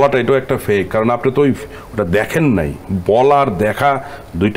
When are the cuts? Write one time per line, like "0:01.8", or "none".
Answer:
none